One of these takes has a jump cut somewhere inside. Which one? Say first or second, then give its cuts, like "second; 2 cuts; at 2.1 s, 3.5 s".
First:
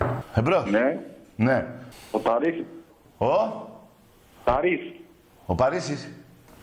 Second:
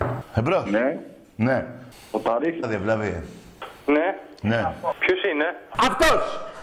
first; 1 cut; at 2.7 s